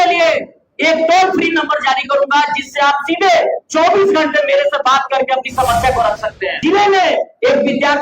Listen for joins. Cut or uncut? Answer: cut